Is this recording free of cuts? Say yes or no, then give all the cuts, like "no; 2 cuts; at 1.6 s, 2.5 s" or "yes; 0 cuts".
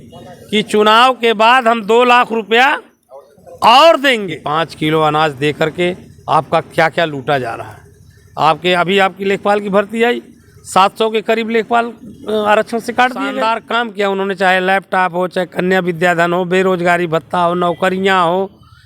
no; 2 cuts; at 4.4 s, 13.6 s